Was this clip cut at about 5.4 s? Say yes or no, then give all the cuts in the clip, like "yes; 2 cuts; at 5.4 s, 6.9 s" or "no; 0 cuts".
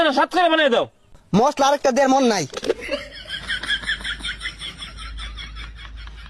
no; 2 cuts; at 1.1 s, 3.0 s